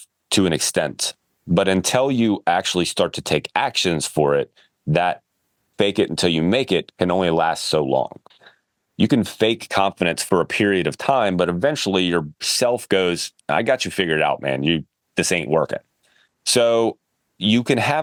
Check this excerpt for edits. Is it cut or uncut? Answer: uncut